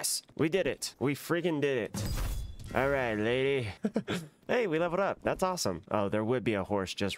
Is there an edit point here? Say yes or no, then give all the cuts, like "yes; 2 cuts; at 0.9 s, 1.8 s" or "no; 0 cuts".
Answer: no; 0 cuts